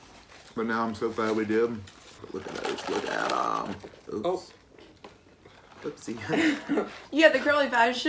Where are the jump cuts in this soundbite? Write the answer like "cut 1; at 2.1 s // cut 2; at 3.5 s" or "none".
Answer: cut 1; at 2.2 s // cut 2; at 7.0 s